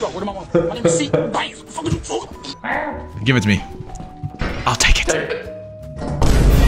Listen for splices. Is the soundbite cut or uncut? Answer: uncut